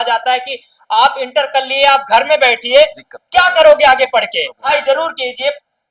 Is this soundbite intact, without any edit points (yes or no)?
no